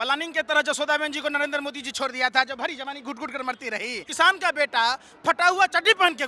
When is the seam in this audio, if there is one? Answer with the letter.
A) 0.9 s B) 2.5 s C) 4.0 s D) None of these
C